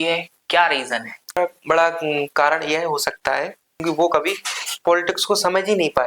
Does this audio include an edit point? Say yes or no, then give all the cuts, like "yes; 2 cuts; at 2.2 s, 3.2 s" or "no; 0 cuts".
yes; 2 cuts; at 1.4 s, 3.8 s